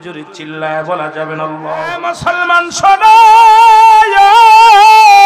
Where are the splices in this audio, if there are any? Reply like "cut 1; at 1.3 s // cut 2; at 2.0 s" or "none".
cut 1; at 2.1 s

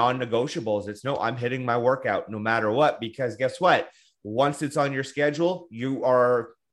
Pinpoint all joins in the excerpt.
none

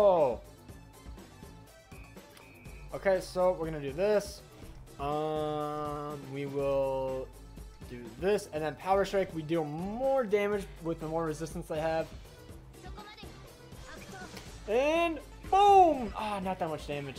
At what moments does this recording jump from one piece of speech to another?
none

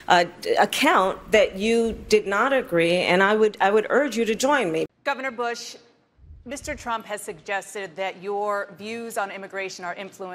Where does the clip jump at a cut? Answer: cut 1; at 4.9 s

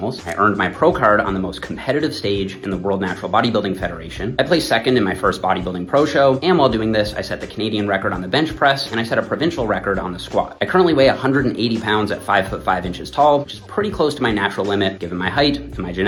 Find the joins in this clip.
none

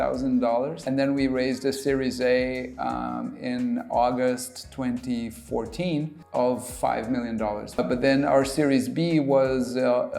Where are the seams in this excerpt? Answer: cut 1; at 0.8 s // cut 2; at 6.2 s // cut 3; at 7.8 s

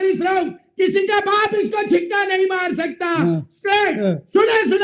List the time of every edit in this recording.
none

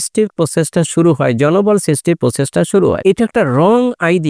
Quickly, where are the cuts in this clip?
cut 1; at 3.0 s

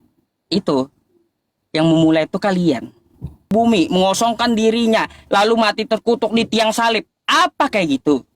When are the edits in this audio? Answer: cut 1; at 3.5 s

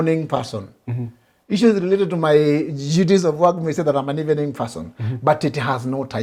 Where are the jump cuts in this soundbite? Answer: none

